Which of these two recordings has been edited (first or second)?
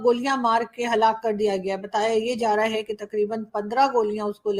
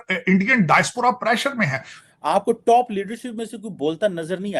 second